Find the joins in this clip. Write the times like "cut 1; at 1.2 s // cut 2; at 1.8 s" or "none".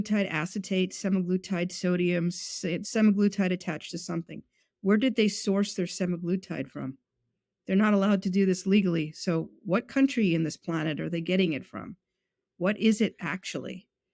cut 1; at 2.7 s